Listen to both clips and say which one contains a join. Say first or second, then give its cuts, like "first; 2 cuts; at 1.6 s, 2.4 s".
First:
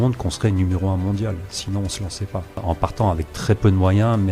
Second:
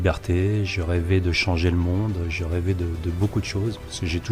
first; 1 cut; at 2.6 s